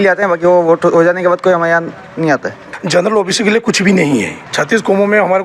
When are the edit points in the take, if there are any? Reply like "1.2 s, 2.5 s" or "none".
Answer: 2.7 s, 4.4 s